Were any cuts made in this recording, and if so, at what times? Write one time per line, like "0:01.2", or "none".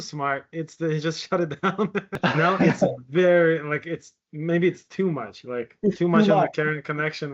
0:02.1